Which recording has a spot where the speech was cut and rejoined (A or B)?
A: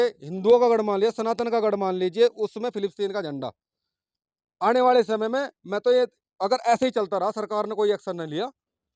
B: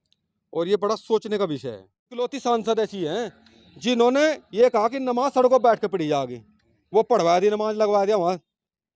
B